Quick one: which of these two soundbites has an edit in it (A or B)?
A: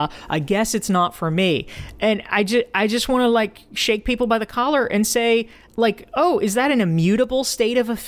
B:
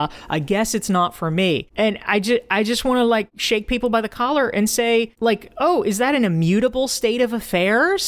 B